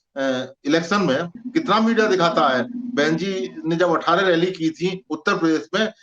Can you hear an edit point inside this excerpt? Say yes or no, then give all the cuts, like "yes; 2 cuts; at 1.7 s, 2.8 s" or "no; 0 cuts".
yes; 1 cut; at 1.4 s